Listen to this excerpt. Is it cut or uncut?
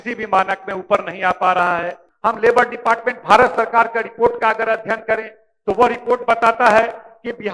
cut